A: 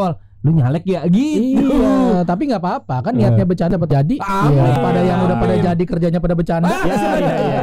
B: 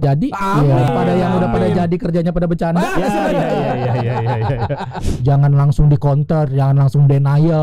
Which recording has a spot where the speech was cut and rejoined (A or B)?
B